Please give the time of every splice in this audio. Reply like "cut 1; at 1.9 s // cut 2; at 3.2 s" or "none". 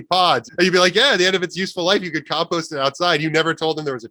none